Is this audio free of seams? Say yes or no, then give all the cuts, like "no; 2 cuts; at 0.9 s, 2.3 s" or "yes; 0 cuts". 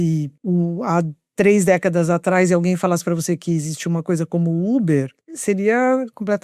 yes; 0 cuts